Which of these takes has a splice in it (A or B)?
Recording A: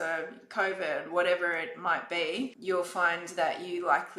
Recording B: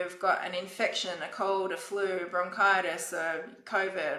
A